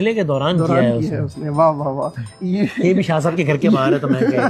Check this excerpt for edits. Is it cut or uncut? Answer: uncut